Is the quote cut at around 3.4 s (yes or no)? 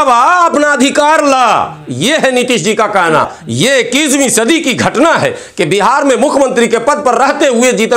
yes